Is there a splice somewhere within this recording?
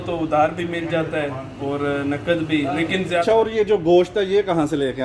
yes; 1 cut; at 3.2 s

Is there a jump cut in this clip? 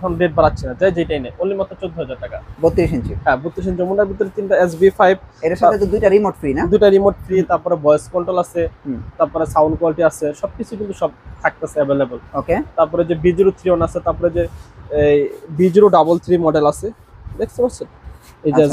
no; 0 cuts

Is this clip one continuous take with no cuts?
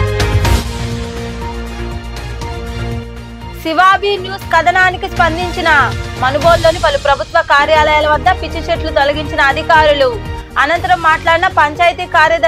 yes; 0 cuts

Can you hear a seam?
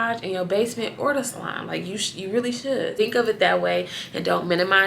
yes; 1 cut; at 2.9 s

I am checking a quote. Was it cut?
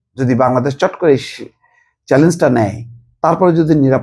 no; 0 cuts

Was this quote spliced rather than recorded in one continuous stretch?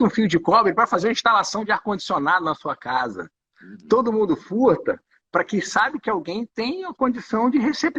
no; 0 cuts

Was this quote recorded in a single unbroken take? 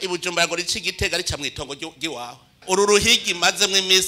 no; 1 cut; at 2.6 s

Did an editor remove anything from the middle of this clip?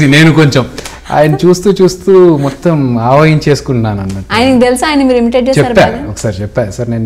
no; 0 cuts

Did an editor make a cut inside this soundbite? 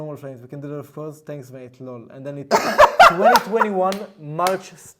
no; 0 cuts

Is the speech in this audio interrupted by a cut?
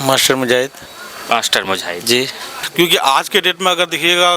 yes; 1 cut; at 2.5 s

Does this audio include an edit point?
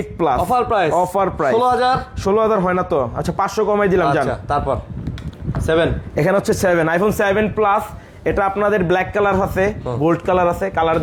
no; 0 cuts

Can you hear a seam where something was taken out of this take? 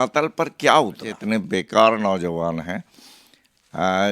yes; 1 cut; at 1.1 s

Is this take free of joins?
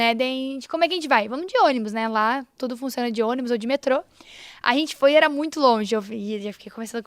yes; 0 cuts

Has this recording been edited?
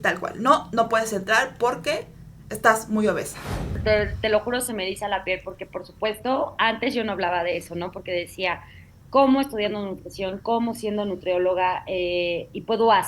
yes; 1 cut; at 3.7 s

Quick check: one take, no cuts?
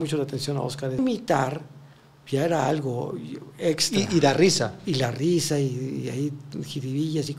no; 1 cut; at 1.0 s

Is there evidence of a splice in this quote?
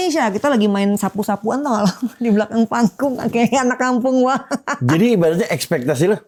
no; 0 cuts

